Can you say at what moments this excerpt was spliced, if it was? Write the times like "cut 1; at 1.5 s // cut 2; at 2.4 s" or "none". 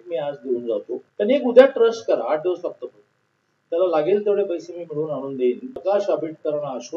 cut 1; at 1.0 s // cut 2; at 5.8 s